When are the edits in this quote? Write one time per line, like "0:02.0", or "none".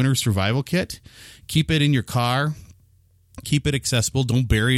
none